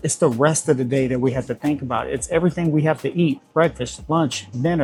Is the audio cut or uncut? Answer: uncut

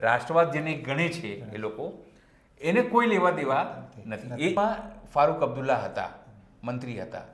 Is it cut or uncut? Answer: cut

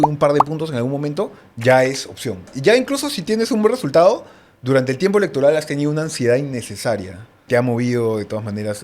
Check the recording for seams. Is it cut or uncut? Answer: cut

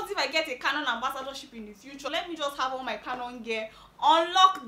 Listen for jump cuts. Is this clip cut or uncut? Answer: uncut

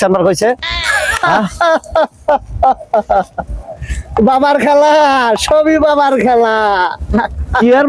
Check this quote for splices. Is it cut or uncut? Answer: uncut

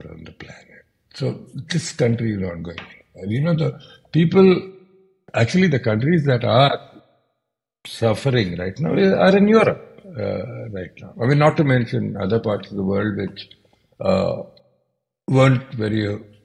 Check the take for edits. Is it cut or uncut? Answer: uncut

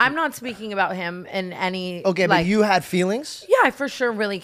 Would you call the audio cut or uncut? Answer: uncut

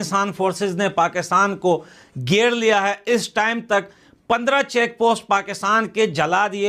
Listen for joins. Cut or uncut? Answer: uncut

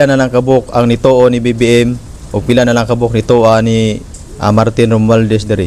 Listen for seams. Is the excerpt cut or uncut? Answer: uncut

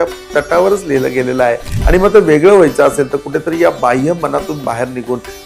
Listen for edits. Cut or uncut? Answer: cut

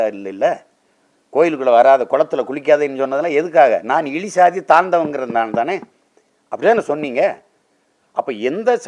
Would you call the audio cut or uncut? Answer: uncut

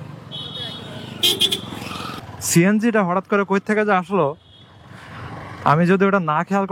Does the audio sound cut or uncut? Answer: uncut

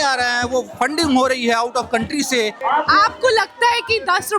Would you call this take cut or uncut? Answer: cut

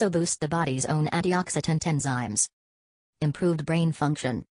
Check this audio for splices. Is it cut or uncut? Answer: uncut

